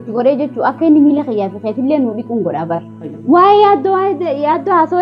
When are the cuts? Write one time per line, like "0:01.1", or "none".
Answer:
0:03.2